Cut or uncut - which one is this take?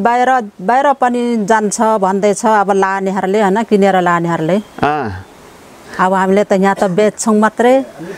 uncut